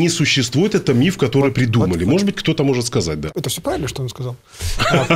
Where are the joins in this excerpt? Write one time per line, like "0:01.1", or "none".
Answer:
0:03.3